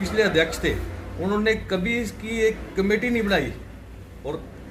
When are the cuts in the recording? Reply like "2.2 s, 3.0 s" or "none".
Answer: none